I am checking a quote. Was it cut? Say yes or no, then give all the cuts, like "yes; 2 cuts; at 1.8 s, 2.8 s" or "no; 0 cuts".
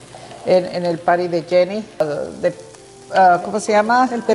yes; 1 cut; at 2.0 s